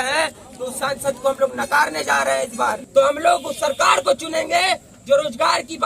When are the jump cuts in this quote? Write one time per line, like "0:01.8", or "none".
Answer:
0:02.8

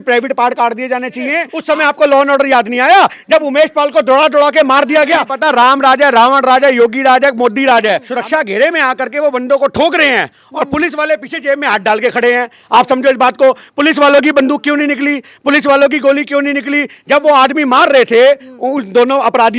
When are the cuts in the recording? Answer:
0:01.5
0:05.3
0:08.1

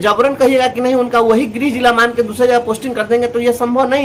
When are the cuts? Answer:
none

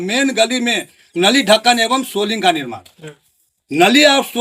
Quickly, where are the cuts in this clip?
none

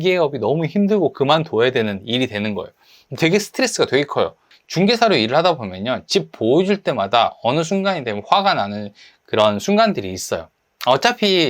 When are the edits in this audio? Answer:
0:04.5

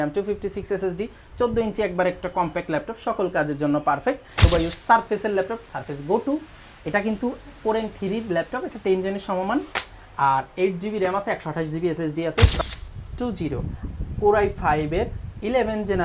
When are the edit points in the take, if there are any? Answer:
0:04.3
0:12.6

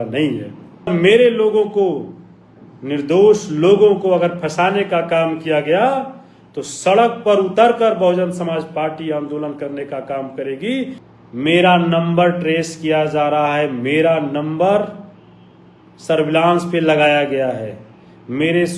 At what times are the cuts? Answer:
0:00.9
0:11.1

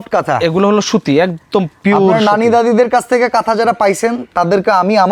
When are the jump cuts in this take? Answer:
none

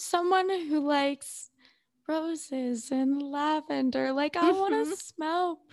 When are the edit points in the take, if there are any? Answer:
none

